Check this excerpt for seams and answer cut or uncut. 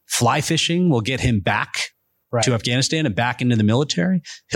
uncut